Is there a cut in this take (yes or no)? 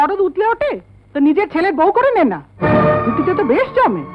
no